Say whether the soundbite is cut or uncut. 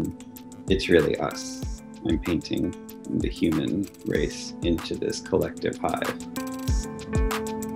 cut